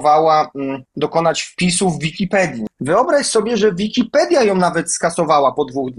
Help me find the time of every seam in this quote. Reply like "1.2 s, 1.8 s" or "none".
2.6 s